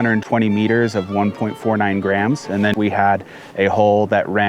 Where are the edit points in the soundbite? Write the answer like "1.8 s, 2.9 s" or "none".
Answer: 2.7 s